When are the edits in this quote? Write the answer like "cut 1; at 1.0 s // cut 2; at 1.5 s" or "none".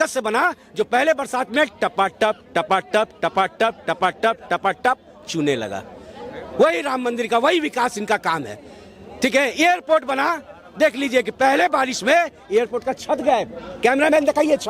none